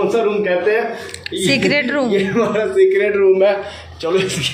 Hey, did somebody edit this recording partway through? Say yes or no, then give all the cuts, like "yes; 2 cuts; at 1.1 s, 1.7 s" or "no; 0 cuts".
no; 0 cuts